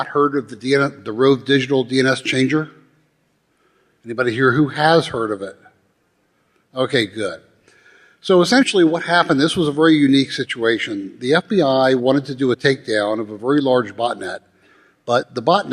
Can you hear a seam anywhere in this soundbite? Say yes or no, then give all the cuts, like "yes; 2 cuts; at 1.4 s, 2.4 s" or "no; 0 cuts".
yes; 1 cut; at 10.1 s